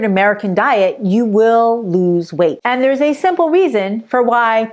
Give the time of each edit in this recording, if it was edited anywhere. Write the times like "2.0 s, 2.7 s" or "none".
none